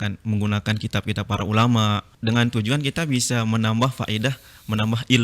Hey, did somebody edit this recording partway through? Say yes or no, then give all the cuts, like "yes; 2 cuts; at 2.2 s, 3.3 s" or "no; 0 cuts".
yes; 1 cut; at 2.1 s